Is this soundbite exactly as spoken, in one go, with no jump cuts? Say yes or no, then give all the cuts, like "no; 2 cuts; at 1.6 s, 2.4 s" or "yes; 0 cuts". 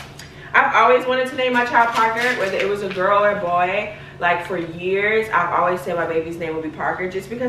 yes; 0 cuts